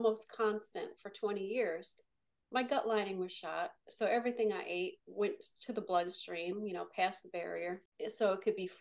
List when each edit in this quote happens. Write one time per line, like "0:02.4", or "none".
0:07.9